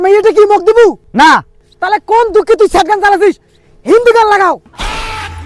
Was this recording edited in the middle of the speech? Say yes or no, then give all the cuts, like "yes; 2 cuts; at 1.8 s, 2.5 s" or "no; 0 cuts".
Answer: no; 0 cuts